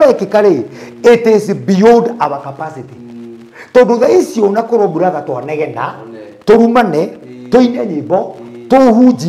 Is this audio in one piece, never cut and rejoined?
yes; 0 cuts

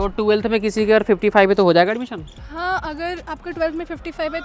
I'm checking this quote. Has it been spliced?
no; 0 cuts

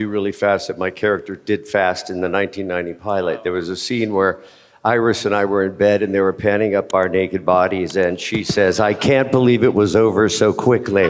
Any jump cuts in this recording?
no; 0 cuts

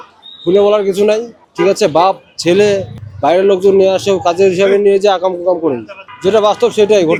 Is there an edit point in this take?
no; 0 cuts

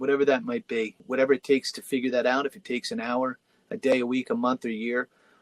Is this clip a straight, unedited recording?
no; 1 cut; at 1.0 s

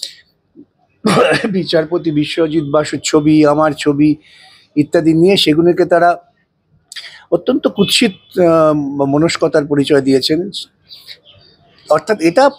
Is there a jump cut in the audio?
no; 0 cuts

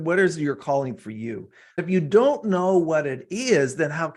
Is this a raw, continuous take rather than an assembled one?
no; 1 cut; at 1.8 s

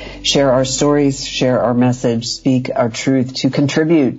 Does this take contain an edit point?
no; 0 cuts

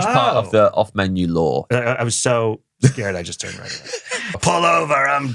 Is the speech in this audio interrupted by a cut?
yes; 2 cuts; at 1.7 s, 4.4 s

